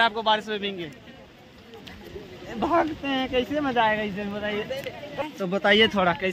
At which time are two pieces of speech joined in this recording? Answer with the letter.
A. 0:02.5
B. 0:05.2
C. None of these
B